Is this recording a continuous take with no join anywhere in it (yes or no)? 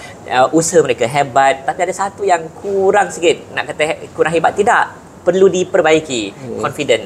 yes